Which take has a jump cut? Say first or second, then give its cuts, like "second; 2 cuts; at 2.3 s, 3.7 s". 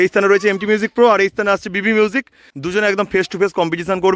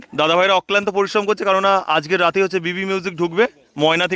first; 1 cut; at 2.7 s